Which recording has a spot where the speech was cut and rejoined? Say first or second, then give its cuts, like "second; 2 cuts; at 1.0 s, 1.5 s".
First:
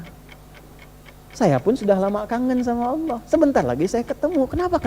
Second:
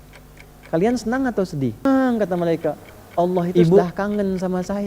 second; 1 cut; at 1.8 s